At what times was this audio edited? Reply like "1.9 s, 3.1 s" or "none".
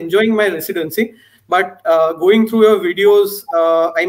none

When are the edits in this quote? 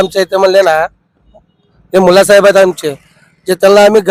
none

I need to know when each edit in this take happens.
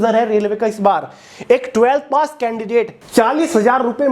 3.0 s

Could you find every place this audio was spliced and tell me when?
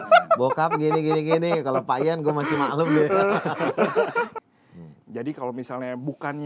4.3 s

